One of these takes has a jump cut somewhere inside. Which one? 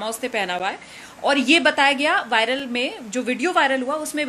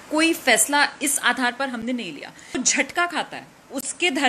second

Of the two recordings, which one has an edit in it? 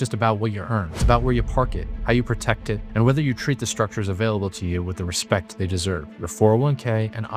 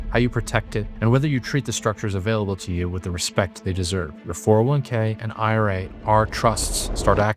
first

